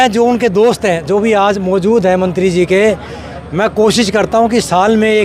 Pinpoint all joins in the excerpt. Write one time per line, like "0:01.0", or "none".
none